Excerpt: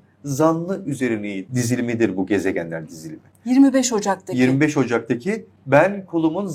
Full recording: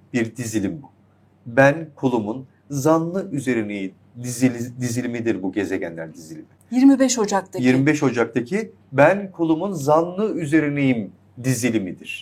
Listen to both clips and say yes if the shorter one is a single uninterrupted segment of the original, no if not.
no